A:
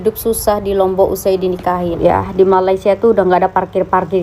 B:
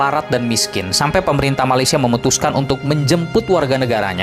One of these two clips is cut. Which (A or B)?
A